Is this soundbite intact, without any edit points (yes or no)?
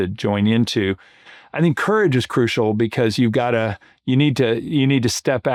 yes